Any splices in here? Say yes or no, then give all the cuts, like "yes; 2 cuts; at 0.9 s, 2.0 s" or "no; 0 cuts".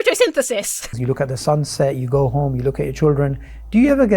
yes; 1 cut; at 0.9 s